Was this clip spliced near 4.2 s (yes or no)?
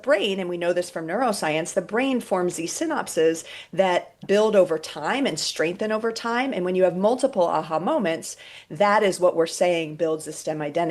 yes